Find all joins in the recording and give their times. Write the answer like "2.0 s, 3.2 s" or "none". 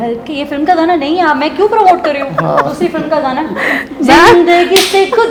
none